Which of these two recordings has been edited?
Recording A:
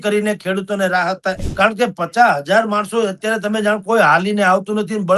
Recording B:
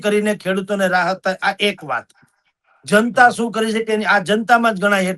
A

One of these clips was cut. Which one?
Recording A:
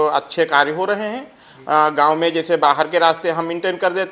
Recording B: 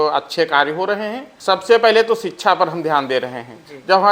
B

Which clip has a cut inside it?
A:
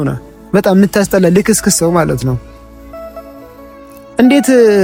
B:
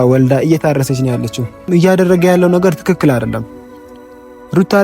B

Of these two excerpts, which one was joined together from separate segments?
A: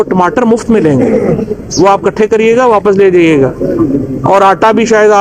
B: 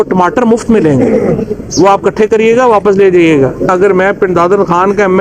B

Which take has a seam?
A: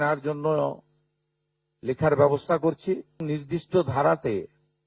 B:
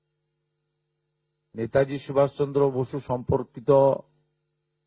A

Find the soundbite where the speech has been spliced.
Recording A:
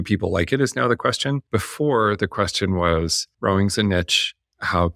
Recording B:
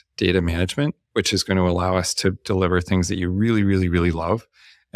A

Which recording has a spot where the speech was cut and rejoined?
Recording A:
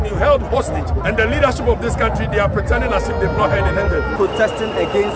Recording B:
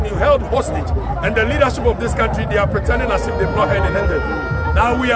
A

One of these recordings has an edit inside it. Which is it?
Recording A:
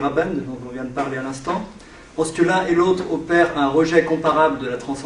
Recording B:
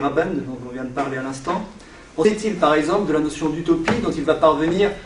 A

